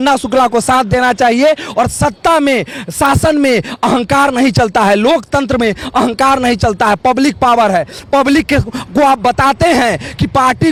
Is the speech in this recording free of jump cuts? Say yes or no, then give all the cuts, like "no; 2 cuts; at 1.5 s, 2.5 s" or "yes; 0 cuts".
yes; 0 cuts